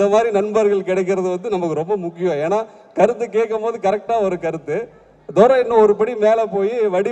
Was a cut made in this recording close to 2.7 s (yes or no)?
no